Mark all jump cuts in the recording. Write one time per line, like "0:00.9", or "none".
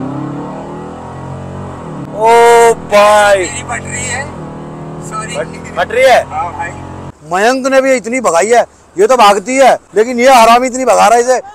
0:02.1
0:07.2
0:09.8